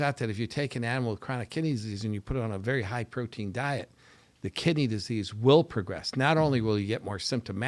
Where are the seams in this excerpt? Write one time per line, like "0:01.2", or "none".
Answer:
none